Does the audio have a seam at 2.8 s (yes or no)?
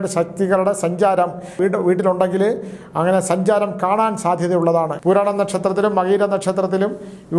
no